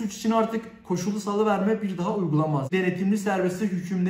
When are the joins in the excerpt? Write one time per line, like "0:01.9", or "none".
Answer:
0:02.7